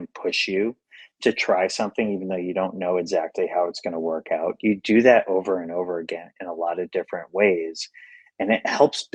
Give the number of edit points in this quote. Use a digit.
0